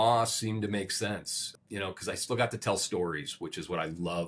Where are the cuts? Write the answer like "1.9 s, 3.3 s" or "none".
none